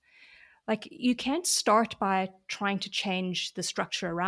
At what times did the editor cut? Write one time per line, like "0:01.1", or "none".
none